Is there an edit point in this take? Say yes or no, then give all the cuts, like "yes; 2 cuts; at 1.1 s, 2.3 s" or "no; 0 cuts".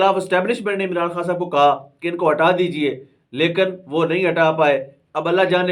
no; 0 cuts